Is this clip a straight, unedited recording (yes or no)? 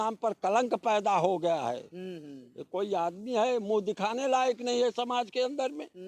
yes